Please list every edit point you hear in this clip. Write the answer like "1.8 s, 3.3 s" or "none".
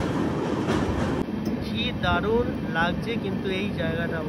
1.2 s